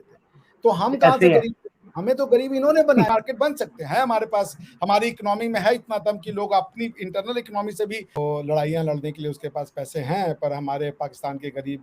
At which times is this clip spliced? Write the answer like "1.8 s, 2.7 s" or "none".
3.1 s, 8.2 s